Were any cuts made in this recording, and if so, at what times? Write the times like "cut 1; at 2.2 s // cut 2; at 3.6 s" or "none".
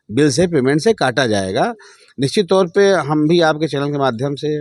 none

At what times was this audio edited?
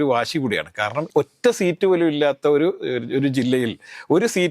cut 1; at 1.0 s

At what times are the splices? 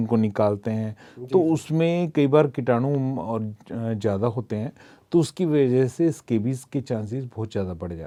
none

